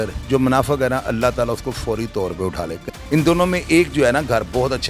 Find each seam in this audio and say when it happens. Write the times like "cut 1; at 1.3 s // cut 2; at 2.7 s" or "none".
cut 1; at 2.8 s